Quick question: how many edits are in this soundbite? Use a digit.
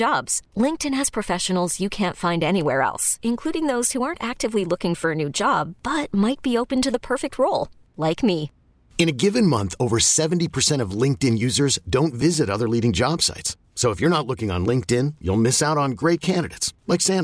0